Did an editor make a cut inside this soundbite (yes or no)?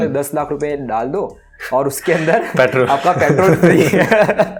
no